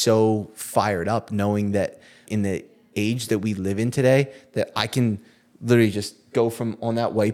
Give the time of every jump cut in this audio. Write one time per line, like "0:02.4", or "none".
0:02.2